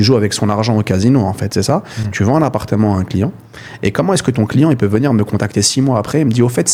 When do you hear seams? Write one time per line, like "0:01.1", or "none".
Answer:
none